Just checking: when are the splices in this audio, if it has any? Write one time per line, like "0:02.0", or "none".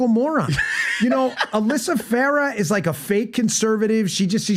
none